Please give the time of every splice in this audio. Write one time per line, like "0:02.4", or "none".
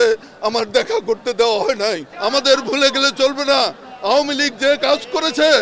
0:02.1